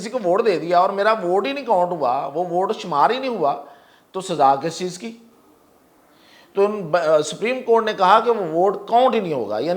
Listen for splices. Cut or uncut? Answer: uncut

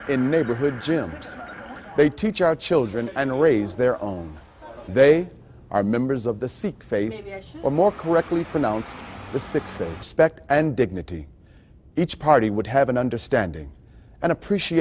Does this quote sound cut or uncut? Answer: uncut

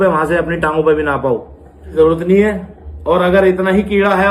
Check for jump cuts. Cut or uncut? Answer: cut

